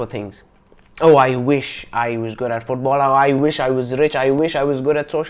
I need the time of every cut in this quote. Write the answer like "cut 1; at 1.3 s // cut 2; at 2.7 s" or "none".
none